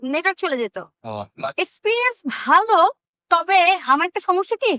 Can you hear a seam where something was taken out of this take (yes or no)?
yes